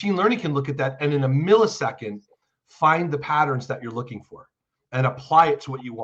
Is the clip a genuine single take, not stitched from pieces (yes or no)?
yes